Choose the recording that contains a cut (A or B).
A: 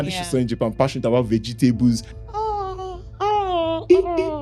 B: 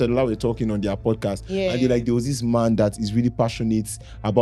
A